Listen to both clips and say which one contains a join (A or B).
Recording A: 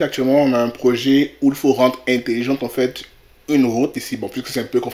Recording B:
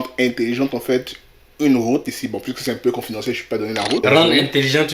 B